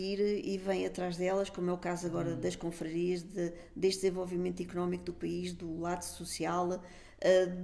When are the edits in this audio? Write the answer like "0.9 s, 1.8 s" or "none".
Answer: none